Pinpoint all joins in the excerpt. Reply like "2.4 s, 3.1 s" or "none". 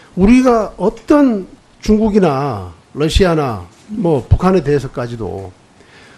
none